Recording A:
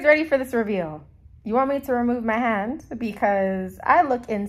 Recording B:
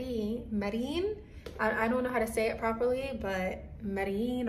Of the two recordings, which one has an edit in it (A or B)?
A